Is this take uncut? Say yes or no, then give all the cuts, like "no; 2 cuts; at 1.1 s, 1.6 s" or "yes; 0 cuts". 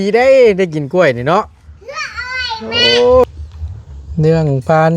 no; 1 cut; at 3.2 s